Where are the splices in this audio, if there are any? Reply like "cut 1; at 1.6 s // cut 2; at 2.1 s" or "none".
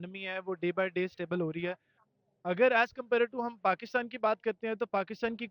none